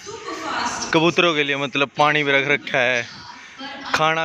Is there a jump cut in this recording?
no; 0 cuts

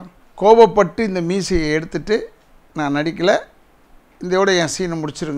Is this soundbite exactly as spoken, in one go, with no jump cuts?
yes; 0 cuts

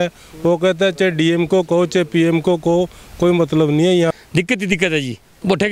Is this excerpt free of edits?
no; 1 cut; at 4.1 s

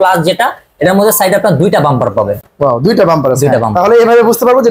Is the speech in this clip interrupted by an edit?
no; 0 cuts

